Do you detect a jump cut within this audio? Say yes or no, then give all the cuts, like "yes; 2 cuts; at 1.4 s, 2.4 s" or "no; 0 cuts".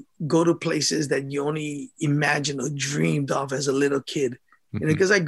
no; 0 cuts